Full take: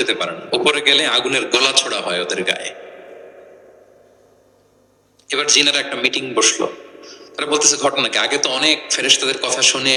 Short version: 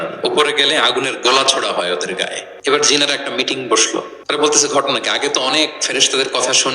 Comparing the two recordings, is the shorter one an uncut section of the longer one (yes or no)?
no